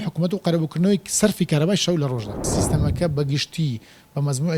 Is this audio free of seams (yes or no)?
no